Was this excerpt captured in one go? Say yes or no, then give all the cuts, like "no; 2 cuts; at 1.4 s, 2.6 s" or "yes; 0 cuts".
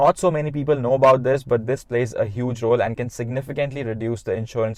yes; 0 cuts